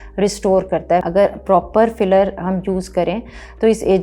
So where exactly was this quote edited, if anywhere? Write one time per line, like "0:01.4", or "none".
0:01.1

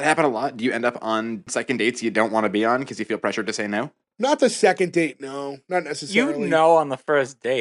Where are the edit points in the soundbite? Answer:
0:01.5
0:04.1

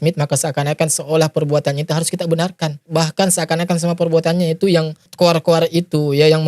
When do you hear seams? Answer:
0:02.8
0:05.0

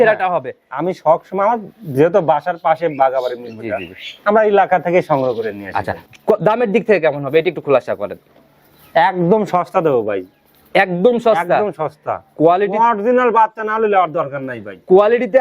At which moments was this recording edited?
0:06.0

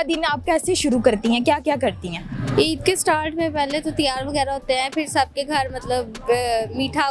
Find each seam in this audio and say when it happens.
none

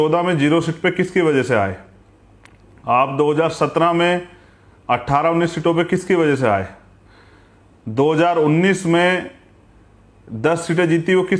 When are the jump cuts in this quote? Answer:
none

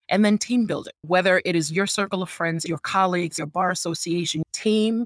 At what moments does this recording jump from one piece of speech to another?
0:01.0
0:02.6
0:03.3

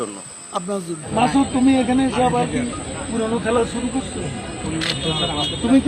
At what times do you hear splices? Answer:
0:01.0

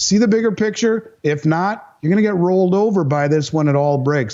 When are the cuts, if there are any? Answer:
none

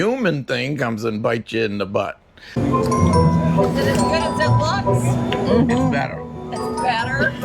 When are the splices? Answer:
0:02.5

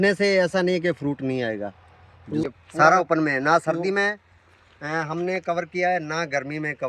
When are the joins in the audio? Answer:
0:02.5

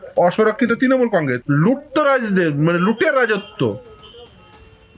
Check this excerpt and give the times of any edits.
0:01.4

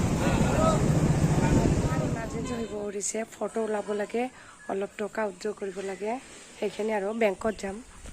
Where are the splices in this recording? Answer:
0:02.3

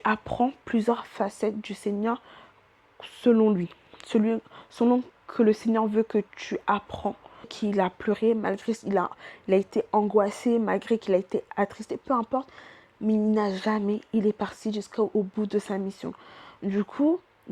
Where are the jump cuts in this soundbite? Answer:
0:07.5

